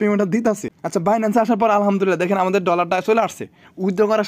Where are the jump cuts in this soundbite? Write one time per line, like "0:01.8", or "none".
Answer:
0:01.0